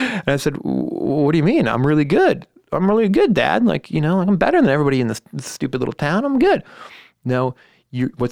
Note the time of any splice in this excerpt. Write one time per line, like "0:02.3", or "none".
none